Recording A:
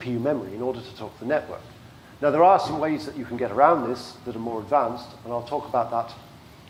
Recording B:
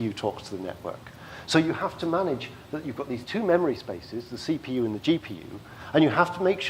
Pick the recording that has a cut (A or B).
B